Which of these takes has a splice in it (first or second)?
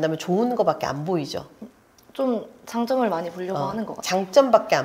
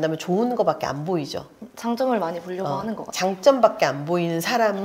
second